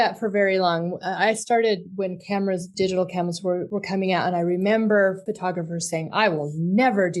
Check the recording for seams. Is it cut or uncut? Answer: cut